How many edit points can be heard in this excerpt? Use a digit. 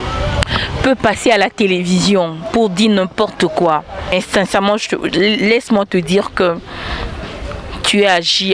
1